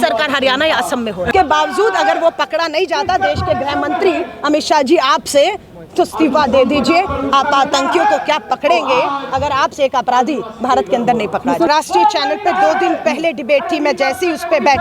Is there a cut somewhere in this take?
yes; 2 cuts; at 1.3 s, 11.7 s

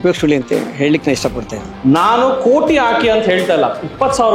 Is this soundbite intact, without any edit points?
no; 1 cut; at 1.7 s

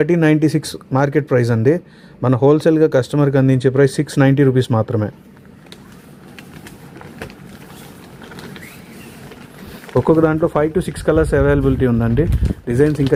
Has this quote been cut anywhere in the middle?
no; 0 cuts

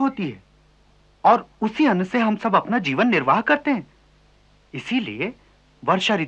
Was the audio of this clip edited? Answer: no; 0 cuts

